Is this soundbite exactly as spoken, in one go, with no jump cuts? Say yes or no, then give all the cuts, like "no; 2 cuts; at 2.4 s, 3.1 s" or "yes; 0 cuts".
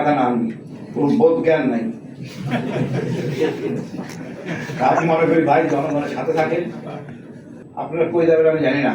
no; 1 cut; at 7.6 s